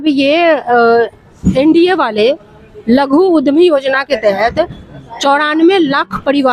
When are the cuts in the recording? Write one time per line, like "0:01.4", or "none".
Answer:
none